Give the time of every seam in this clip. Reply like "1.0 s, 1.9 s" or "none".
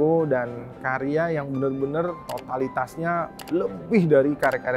2.3 s, 3.4 s